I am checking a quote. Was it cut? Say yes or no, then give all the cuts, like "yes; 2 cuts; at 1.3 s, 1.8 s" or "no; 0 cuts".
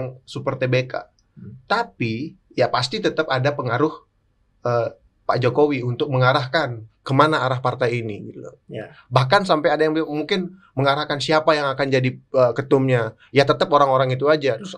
no; 0 cuts